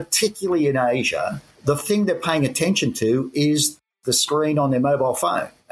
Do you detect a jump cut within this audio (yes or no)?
yes